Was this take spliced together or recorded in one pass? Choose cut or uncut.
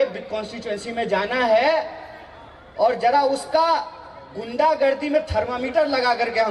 uncut